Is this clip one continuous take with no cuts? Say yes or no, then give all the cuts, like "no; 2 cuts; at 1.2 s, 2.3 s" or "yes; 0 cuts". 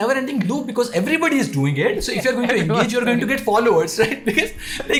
yes; 0 cuts